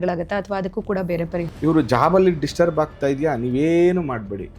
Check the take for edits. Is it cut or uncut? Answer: cut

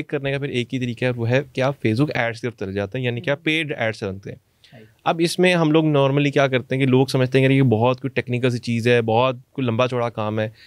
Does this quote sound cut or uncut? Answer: uncut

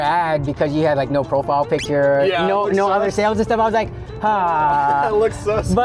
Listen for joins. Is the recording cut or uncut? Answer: uncut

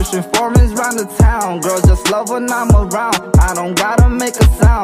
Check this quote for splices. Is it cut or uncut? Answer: uncut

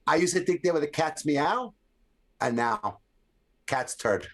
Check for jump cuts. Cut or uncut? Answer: uncut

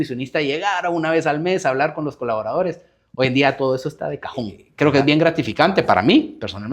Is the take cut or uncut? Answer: cut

